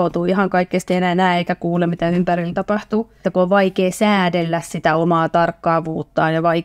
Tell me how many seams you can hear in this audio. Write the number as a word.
one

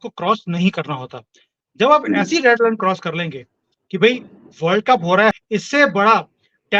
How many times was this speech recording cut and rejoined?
one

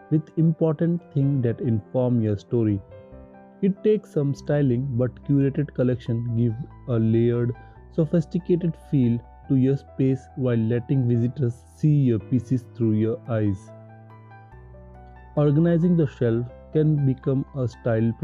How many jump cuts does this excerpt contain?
two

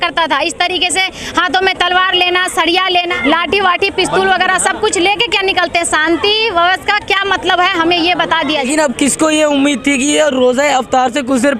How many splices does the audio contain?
two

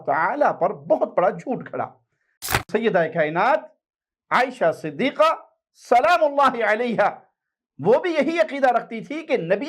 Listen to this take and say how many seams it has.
one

